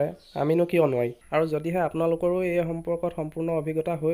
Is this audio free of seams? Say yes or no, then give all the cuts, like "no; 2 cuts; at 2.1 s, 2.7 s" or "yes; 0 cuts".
no; 1 cut; at 1.2 s